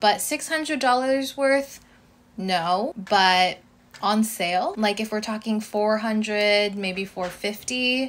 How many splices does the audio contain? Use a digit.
1